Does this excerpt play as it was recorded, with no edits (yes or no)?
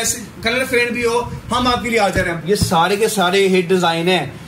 no